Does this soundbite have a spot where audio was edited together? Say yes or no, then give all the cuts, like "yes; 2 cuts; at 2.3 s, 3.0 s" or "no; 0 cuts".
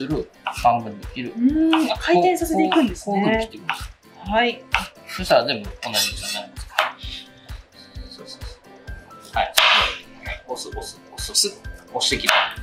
no; 0 cuts